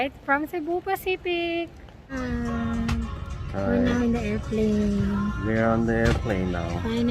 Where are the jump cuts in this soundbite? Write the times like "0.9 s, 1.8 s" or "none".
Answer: 2.0 s